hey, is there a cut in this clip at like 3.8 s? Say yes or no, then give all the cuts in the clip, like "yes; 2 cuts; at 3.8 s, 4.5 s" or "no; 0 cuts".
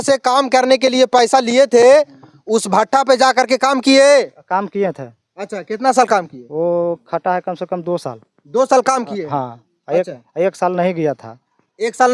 no; 0 cuts